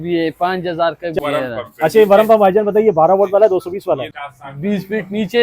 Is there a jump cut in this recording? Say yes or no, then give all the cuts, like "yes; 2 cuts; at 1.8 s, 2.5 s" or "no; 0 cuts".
yes; 2 cuts; at 1.2 s, 4.1 s